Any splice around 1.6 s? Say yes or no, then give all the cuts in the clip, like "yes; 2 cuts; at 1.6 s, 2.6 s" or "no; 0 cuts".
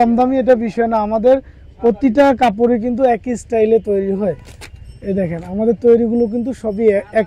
no; 0 cuts